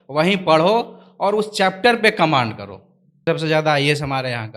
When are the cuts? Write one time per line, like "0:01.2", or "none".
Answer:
0:03.2